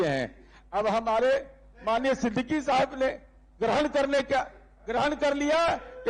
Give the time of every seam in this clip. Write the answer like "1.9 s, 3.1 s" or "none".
none